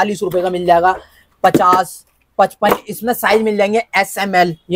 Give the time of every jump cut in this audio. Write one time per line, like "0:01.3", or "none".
none